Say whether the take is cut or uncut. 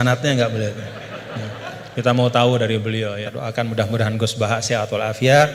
uncut